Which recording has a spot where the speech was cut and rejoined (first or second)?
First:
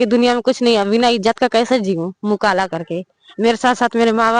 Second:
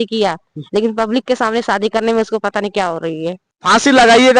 second